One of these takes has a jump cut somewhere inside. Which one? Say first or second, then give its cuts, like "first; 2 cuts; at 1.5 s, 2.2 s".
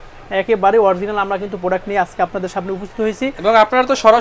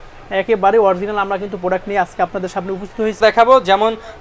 second; 1 cut; at 3.2 s